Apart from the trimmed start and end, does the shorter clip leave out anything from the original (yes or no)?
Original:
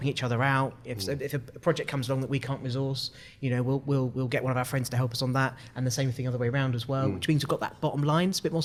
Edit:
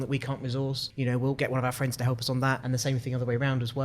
yes